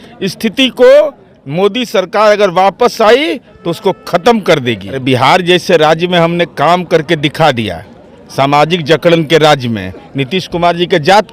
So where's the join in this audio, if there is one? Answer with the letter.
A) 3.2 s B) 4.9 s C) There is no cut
B